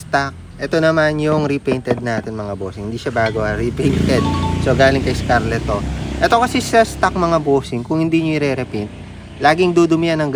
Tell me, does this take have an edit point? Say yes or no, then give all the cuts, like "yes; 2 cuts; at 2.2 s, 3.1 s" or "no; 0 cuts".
no; 0 cuts